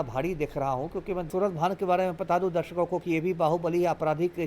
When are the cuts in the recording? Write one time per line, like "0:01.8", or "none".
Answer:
0:01.3